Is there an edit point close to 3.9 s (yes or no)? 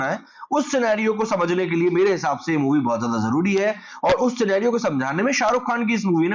no